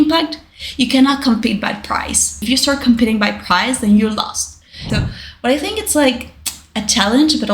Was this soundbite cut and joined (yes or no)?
yes